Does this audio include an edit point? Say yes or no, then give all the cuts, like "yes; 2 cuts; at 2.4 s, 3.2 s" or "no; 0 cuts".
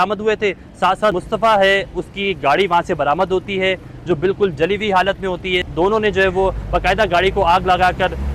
yes; 2 cuts; at 1.2 s, 5.7 s